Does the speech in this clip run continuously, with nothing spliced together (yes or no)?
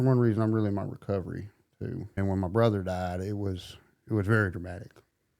no